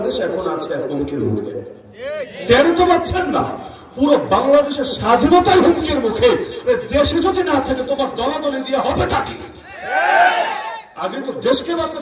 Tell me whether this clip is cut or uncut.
uncut